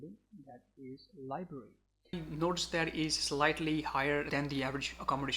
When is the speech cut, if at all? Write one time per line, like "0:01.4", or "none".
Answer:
0:02.2
0:04.3